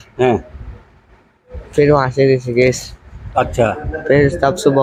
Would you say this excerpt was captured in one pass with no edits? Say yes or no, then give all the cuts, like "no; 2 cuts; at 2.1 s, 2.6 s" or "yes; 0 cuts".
yes; 0 cuts